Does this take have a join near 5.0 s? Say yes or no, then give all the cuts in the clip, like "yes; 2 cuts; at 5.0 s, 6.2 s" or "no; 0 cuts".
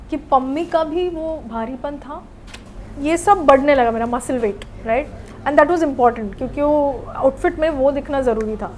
no; 1 cut; at 2.6 s